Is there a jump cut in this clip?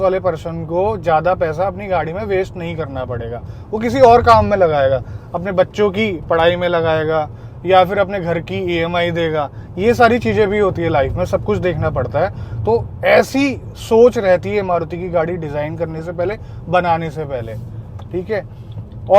no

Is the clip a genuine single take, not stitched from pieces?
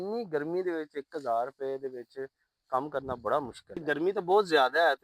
no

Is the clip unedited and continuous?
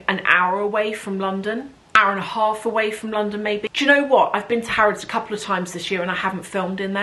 no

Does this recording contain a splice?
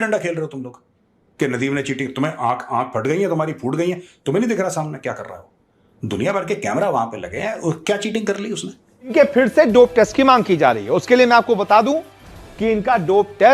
yes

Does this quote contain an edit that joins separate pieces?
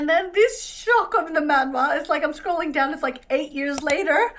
no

